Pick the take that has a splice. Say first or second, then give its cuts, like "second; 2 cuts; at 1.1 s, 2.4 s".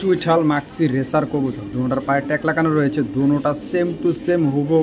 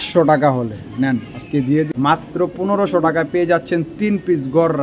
second; 1 cut; at 1.9 s